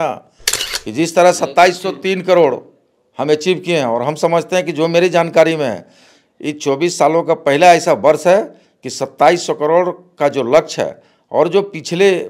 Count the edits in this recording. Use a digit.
0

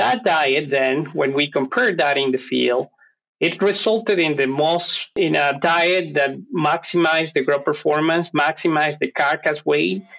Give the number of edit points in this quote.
1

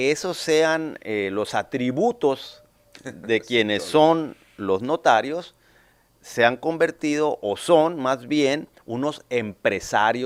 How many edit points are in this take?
0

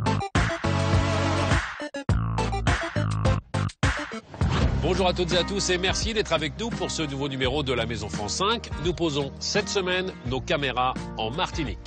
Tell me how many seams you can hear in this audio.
1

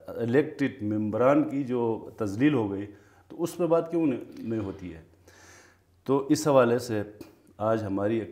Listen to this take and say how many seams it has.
0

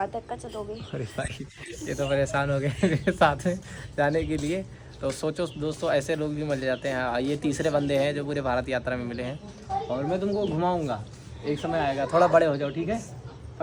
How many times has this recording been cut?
0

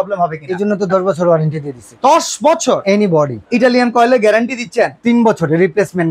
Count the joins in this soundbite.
1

